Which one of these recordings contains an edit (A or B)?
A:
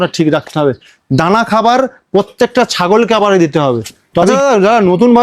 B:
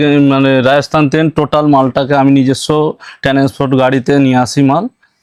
A